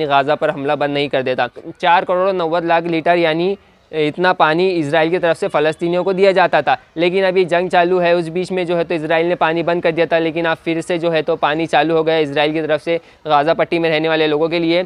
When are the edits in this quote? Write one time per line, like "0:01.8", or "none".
0:01.8